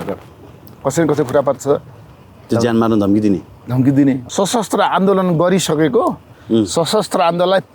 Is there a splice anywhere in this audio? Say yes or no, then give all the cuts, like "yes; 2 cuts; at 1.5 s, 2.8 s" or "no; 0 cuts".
yes; 1 cut; at 4.2 s